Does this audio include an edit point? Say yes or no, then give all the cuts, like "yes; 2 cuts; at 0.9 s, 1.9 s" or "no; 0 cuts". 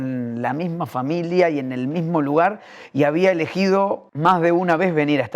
yes; 1 cut; at 4.1 s